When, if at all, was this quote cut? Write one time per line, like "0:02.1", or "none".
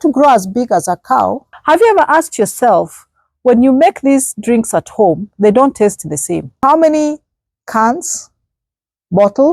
0:01.5
0:06.6